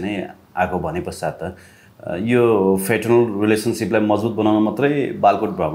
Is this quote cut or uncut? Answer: uncut